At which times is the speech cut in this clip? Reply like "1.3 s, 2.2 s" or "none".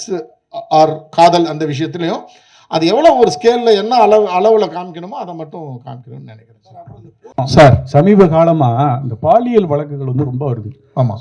7.3 s